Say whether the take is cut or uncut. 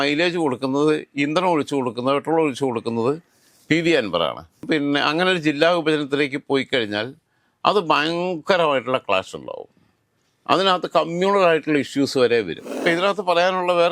cut